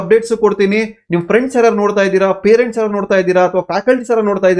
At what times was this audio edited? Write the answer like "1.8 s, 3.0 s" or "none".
none